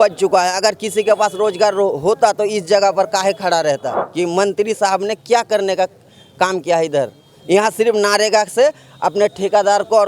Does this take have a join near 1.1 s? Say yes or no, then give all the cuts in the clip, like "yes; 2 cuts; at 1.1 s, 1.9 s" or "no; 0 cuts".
no; 1 cut; at 4.0 s